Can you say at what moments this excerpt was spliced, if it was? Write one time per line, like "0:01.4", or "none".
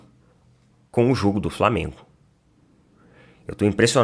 none